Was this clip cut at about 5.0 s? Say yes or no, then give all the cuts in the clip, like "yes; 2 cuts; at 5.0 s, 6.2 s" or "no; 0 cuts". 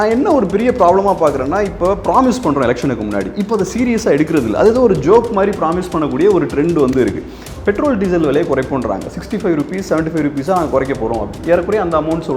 no; 1 cut; at 7.4 s